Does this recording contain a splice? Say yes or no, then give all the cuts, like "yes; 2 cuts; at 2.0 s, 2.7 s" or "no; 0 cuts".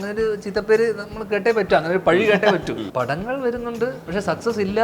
yes; 2 cuts; at 2.9 s, 4.0 s